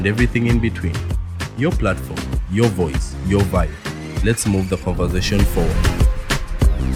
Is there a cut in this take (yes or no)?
no